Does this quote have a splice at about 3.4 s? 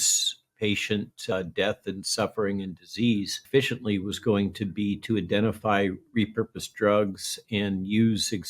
yes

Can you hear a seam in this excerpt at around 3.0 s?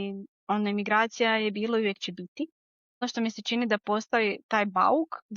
yes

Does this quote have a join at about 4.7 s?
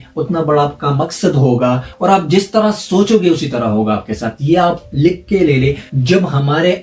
no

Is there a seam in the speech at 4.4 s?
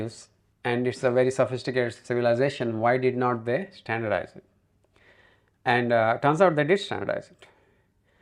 no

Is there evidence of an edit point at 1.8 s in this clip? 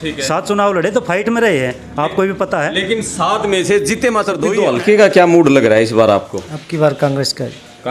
no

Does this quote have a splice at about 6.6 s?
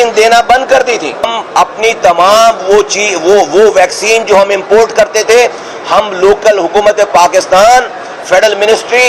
no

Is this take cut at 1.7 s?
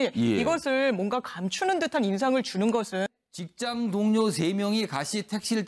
no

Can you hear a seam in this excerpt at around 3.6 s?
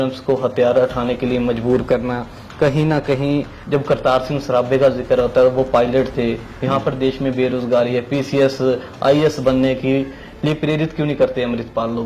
yes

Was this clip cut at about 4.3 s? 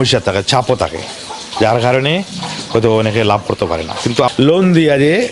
yes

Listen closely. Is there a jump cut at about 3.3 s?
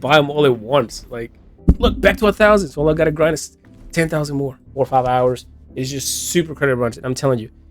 no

